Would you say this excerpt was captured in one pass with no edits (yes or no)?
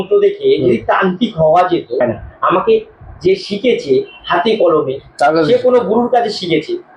no